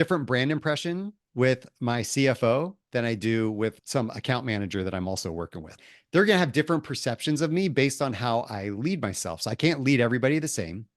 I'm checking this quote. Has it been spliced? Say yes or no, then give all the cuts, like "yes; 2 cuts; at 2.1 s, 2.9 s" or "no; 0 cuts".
yes; 2 cuts; at 3.8 s, 5.8 s